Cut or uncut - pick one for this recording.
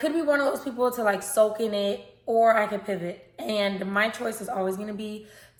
uncut